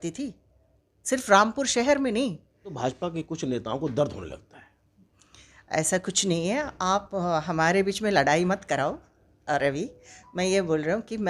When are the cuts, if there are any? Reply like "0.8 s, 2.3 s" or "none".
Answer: 2.8 s